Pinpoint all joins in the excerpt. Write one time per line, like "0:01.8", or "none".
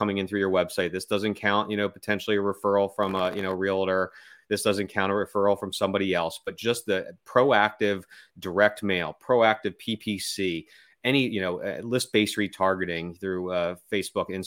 none